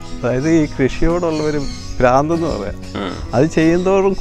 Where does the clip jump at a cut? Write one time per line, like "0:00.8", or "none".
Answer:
none